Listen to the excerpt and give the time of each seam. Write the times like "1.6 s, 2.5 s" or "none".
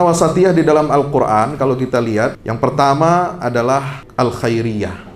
2.4 s, 4.0 s